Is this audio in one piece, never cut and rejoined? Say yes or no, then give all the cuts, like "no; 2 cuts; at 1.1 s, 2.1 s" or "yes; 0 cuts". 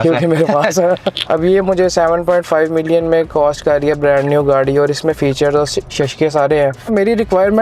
no; 2 cuts; at 1.2 s, 6.9 s